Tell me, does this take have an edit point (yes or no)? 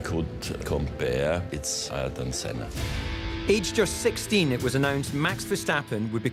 no